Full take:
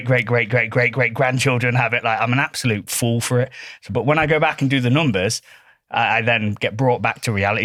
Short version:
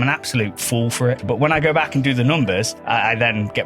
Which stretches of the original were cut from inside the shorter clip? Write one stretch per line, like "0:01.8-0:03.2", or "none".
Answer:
0:03.5-0:03.9
0:05.4-0:05.8